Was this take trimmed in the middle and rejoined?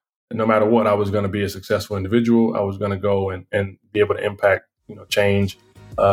no; 0 cuts

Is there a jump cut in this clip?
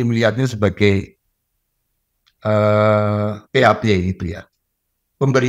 no; 0 cuts

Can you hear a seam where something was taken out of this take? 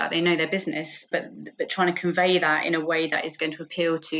yes; 1 cut; at 1.0 s

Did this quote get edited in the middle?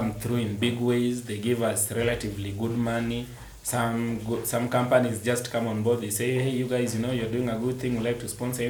no; 0 cuts

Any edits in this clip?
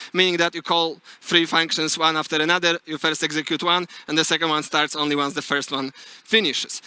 no; 0 cuts

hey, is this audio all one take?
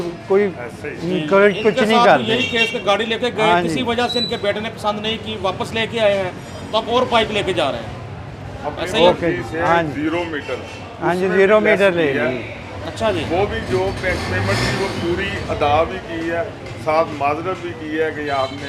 yes; 0 cuts

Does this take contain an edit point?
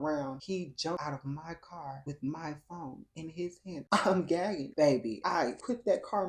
yes; 2 cuts; at 1.0 s, 4.6 s

